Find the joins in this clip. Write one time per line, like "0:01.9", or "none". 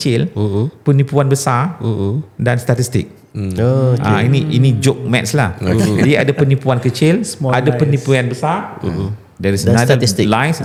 none